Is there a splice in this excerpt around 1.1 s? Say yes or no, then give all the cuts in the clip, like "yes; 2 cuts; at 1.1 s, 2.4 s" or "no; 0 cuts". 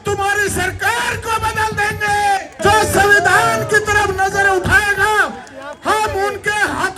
no; 1 cut; at 2.5 s